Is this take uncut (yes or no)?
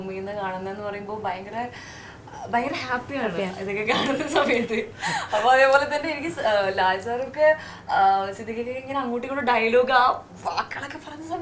yes